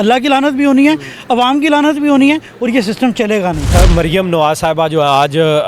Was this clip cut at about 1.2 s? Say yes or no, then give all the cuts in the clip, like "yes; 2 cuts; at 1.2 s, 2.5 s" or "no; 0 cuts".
no; 1 cut; at 3.7 s